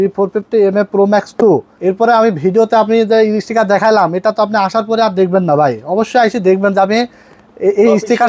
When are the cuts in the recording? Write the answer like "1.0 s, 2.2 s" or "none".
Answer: none